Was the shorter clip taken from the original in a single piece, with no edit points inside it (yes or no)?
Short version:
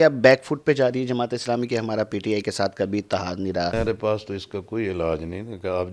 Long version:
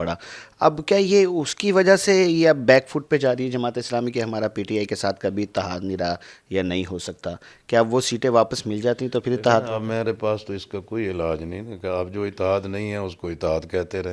no